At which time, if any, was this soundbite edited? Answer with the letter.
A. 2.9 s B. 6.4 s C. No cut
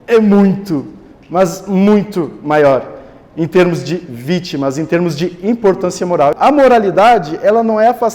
B